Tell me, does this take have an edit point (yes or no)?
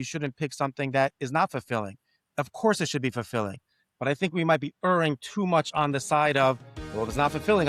no